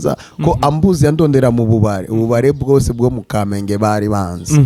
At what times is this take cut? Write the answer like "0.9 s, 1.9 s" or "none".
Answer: none